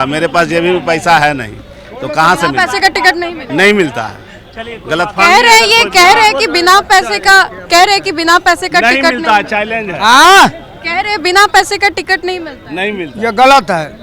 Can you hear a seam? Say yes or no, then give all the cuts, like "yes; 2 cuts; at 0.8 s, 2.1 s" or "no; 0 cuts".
no; 0 cuts